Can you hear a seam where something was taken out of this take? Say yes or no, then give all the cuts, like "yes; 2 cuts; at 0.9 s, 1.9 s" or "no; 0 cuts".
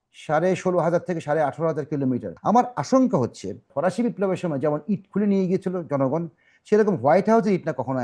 yes; 2 cuts; at 2.3 s, 3.6 s